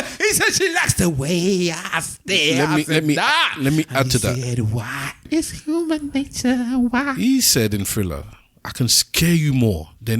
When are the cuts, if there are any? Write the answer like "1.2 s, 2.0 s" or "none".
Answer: 5.2 s